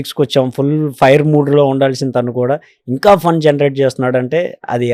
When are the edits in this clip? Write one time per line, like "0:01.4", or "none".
none